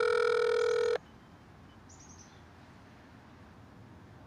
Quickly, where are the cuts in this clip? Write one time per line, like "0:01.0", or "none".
0:00.9